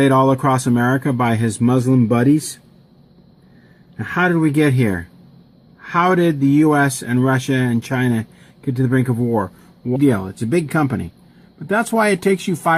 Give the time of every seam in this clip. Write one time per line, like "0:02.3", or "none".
none